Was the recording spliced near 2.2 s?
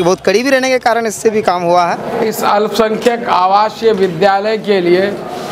yes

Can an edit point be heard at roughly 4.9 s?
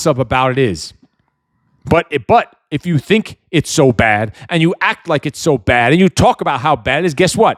no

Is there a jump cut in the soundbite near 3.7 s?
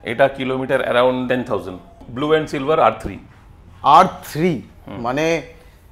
no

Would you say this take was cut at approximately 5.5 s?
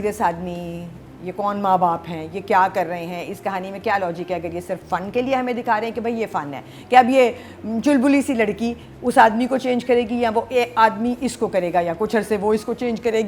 no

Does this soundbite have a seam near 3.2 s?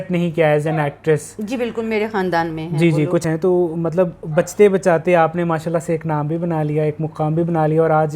yes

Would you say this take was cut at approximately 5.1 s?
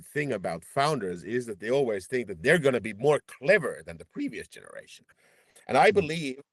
yes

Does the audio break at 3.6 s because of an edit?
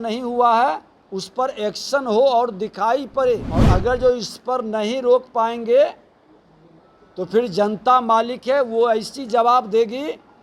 yes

